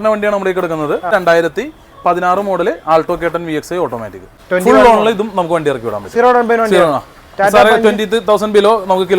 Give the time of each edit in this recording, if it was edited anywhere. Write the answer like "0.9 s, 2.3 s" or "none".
1.1 s, 4.4 s